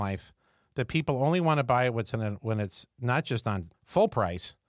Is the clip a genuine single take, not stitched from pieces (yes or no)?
no